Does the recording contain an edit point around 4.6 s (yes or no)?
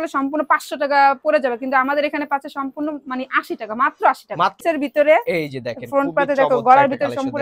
yes